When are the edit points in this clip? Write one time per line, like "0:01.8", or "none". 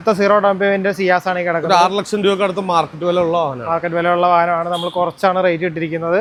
none